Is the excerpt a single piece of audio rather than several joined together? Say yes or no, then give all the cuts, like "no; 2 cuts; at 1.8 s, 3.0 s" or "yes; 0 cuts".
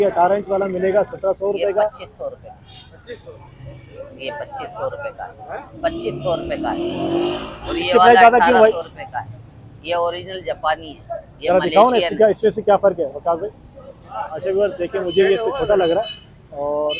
yes; 0 cuts